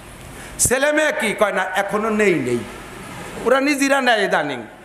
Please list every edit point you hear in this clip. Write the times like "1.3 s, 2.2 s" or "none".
3.4 s